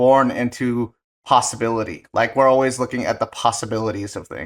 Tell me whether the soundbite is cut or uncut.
uncut